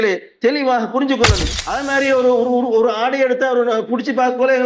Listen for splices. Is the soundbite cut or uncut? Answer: cut